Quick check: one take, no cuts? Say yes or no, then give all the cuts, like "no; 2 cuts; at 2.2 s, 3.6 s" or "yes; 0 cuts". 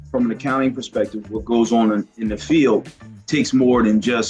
yes; 0 cuts